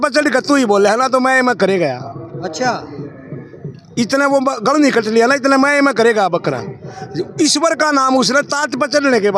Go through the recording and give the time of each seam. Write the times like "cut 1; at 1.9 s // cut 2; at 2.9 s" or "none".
none